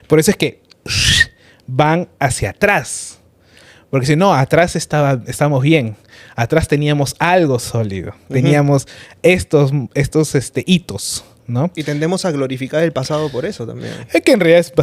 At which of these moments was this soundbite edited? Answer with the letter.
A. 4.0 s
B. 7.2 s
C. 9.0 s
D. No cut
D